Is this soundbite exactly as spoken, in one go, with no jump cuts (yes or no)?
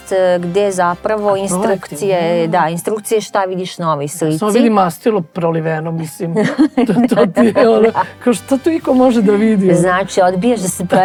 yes